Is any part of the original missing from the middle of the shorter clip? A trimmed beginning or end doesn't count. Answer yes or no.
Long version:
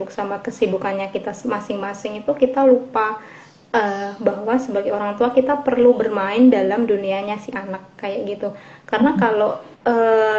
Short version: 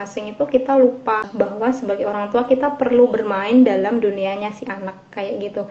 yes